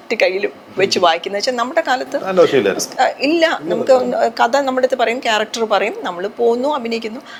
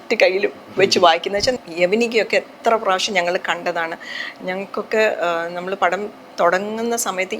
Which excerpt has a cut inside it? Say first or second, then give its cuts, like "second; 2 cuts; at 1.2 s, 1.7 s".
second; 1 cut; at 1.6 s